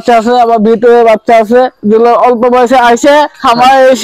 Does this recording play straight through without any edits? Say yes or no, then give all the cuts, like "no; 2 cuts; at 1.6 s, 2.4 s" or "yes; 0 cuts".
yes; 0 cuts